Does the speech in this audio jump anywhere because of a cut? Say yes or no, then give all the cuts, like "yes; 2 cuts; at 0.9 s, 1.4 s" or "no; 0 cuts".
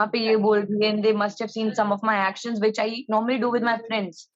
no; 0 cuts